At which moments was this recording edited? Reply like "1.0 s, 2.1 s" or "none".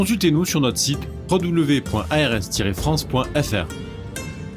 3.7 s